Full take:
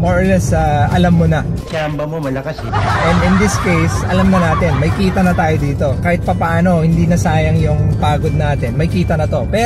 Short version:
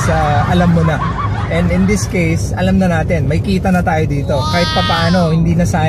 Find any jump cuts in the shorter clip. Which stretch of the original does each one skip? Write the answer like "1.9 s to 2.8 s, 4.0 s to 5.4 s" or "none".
1.7 s to 2.8 s